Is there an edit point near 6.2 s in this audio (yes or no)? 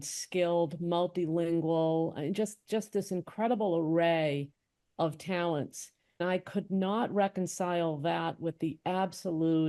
yes